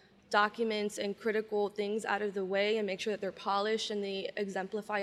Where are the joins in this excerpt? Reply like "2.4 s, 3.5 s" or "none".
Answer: none